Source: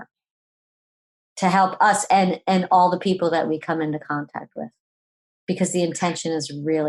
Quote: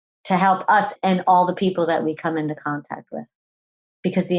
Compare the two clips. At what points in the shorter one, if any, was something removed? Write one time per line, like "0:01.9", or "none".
0:00.9